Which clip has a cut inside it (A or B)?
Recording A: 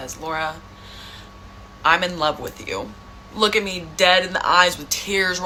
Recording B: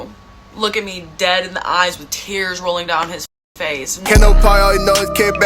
B